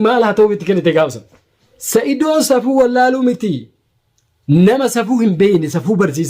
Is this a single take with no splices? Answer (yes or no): no